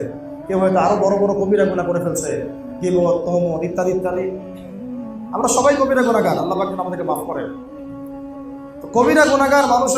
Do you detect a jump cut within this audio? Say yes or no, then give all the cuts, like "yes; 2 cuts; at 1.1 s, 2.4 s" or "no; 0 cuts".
yes; 2 cuts; at 7.5 s, 8.9 s